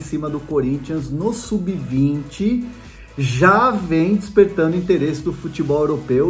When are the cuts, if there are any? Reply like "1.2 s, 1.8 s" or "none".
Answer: none